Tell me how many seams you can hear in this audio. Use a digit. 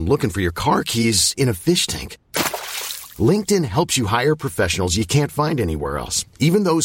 0